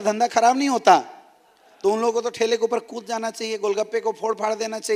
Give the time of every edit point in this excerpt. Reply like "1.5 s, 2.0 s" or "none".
none